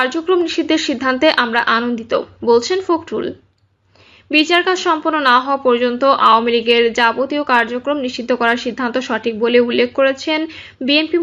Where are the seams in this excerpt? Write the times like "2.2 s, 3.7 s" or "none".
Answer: none